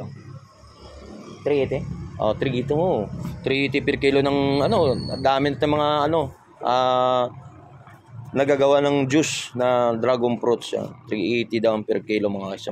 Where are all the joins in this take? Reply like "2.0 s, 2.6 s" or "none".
none

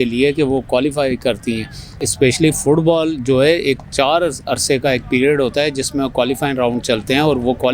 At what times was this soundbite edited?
1.9 s

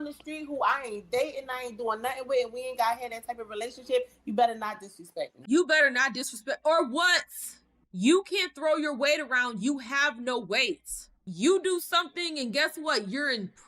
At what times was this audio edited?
5.3 s, 11.2 s

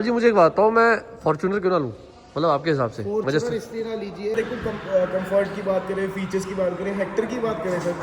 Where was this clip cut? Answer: 4.3 s

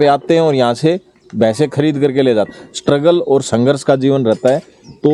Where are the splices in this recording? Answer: 2.5 s

